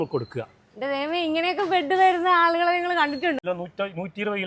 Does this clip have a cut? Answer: yes; 1 cut; at 3.4 s

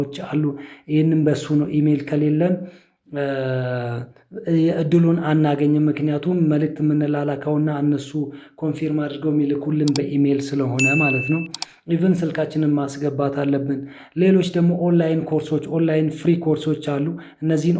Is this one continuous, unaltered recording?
yes; 0 cuts

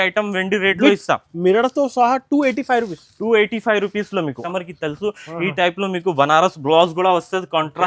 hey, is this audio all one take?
no; 1 cut; at 4.4 s

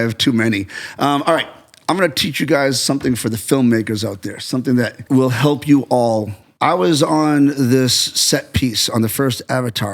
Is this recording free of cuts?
no; 2 cuts; at 5.0 s, 6.4 s

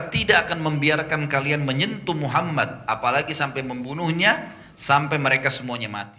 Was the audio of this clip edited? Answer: no; 0 cuts

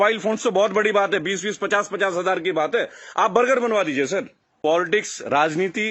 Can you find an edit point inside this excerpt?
yes; 1 cut; at 4.4 s

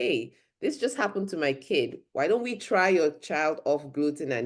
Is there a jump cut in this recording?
no; 0 cuts

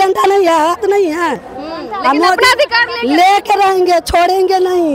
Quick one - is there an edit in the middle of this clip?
no; 0 cuts

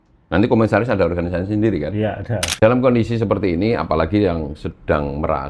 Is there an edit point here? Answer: yes; 1 cut; at 2.5 s

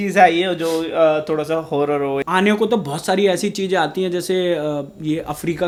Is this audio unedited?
yes; 0 cuts

